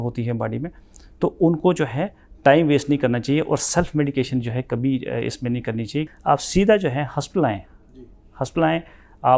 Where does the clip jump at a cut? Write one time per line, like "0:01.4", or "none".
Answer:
0:06.1